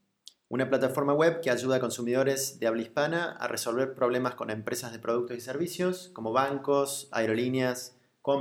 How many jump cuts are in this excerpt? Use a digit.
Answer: 3